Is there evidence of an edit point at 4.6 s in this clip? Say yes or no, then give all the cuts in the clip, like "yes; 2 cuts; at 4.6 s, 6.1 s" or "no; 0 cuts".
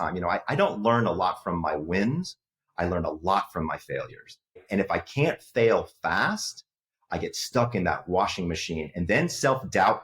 yes; 1 cut; at 4.6 s